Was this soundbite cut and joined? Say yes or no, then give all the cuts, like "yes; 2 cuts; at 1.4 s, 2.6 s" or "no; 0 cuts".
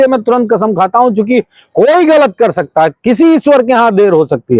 no; 0 cuts